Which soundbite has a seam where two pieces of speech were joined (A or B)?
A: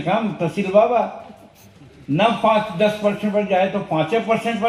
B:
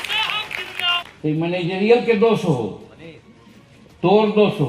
B